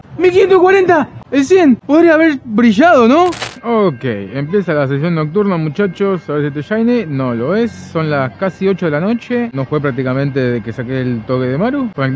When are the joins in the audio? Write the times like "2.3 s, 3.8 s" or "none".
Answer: 3.5 s